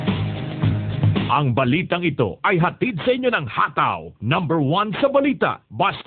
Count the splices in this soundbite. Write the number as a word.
one